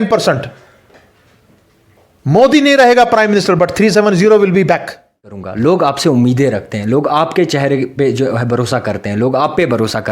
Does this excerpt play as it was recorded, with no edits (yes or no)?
no